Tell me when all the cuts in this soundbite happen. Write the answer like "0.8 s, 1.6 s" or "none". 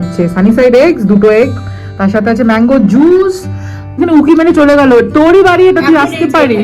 4.0 s

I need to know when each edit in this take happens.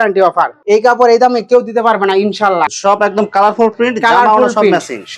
2.7 s

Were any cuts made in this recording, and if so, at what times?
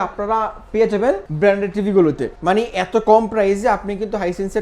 1.3 s, 2.3 s

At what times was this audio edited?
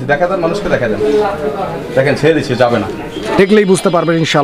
3.5 s

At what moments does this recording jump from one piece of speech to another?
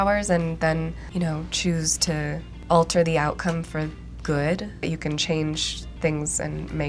1.0 s, 2.5 s, 4.8 s

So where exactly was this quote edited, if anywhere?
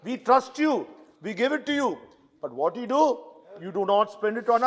none

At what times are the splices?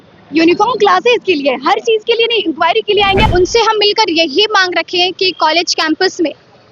3.3 s

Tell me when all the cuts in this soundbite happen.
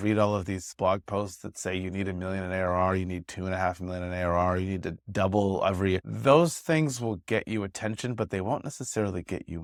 none

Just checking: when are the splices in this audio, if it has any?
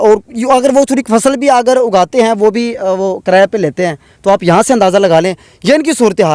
none

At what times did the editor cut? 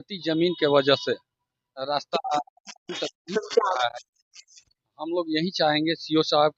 none

